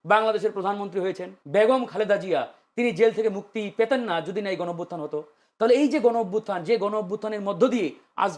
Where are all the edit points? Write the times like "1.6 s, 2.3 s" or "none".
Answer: 1.3 s